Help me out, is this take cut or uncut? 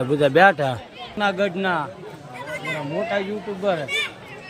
cut